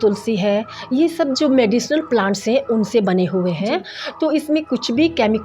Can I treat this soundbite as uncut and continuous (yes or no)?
yes